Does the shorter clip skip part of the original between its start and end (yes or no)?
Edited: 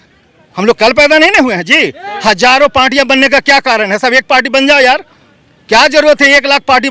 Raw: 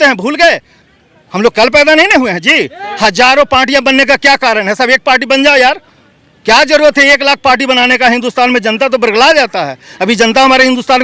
no